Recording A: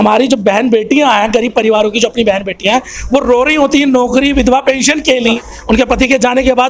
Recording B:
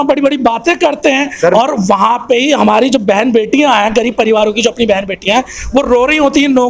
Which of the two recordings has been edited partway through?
A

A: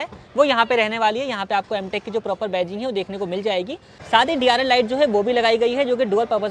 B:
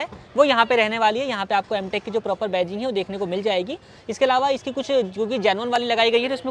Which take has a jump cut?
A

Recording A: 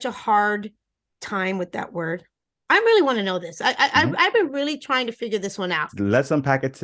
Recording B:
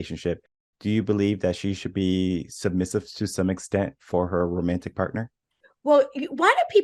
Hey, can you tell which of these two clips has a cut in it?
A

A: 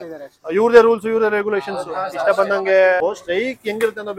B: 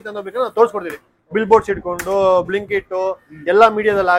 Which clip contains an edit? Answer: A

